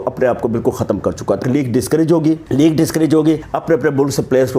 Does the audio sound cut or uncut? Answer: cut